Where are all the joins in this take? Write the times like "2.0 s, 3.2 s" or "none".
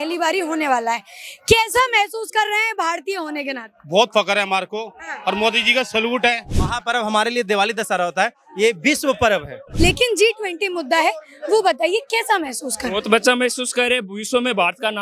6.6 s, 9.6 s